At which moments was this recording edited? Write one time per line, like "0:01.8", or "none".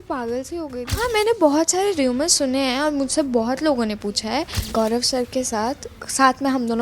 0:00.9
0:04.6